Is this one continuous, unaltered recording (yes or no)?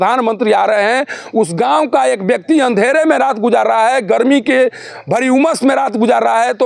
yes